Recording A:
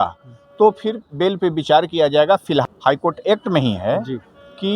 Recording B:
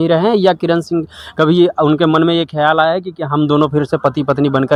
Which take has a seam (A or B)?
A